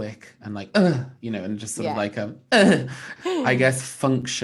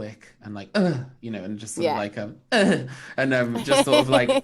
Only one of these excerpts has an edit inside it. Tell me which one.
first; 1 cut; at 3.3 s

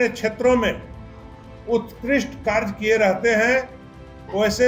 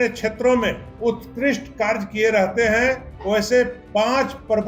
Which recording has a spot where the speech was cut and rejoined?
second; 2 cuts; at 0.9 s, 3.1 s

